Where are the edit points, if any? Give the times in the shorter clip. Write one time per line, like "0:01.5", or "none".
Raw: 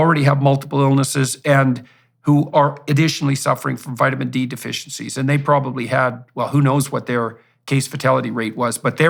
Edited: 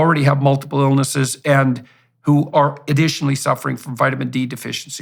none